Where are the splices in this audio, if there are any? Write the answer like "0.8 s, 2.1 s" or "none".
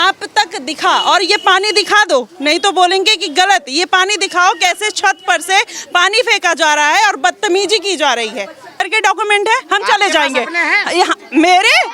8.8 s